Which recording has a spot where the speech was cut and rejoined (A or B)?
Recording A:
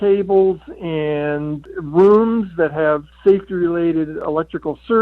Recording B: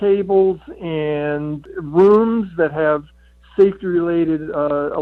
A